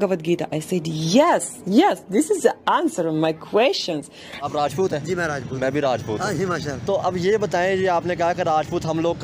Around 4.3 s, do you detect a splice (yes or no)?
yes